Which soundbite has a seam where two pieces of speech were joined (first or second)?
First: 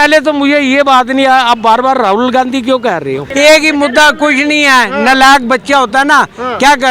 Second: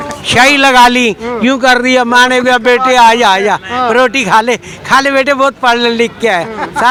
first